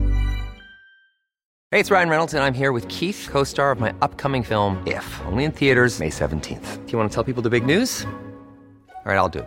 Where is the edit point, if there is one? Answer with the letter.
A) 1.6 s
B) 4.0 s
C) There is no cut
A